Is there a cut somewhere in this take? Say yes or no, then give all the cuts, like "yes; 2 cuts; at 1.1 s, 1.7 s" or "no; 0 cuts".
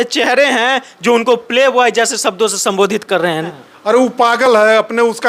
yes; 1 cut; at 3.5 s